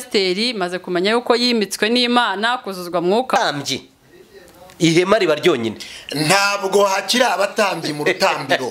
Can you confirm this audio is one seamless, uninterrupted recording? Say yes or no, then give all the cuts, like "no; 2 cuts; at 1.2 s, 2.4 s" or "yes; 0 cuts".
no; 1 cut; at 3.4 s